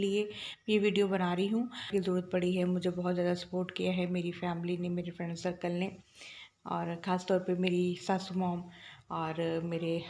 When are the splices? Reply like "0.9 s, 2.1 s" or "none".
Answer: 1.9 s